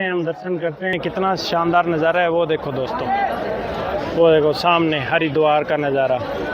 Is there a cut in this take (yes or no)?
yes